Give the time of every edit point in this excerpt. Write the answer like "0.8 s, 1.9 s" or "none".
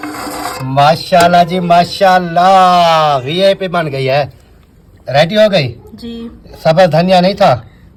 none